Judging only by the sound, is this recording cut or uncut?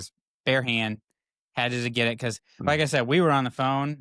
uncut